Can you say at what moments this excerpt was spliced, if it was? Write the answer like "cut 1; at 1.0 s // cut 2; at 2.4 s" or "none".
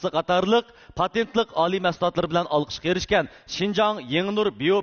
none